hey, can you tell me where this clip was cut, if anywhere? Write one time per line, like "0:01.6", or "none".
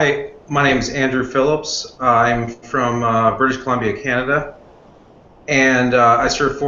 none